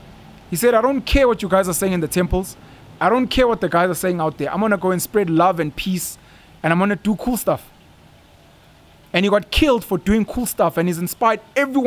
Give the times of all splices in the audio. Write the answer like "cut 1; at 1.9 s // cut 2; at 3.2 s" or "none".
none